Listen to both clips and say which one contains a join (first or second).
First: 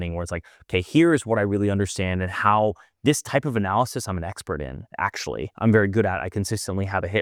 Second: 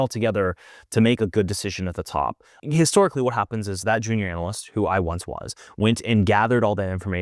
second